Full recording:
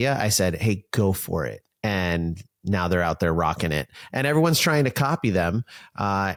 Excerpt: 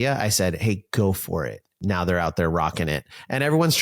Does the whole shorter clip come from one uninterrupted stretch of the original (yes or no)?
no